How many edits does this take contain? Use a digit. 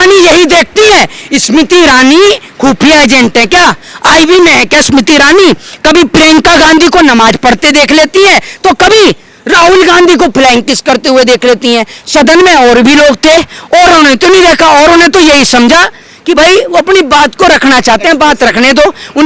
0